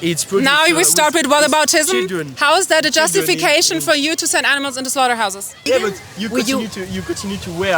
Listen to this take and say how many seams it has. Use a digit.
1